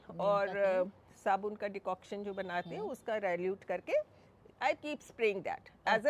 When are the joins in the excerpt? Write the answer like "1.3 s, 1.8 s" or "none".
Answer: none